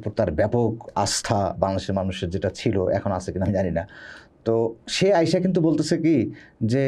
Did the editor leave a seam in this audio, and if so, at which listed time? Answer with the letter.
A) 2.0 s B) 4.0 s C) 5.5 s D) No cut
D